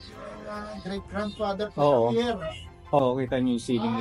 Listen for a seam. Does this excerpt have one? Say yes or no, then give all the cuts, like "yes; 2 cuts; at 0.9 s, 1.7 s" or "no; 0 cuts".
yes; 1 cut; at 3.0 s